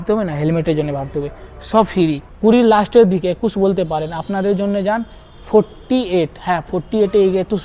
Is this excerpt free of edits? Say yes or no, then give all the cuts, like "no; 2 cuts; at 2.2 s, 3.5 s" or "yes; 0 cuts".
no; 1 cut; at 2.3 s